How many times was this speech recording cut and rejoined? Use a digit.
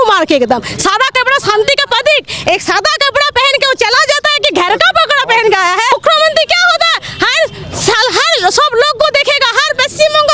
1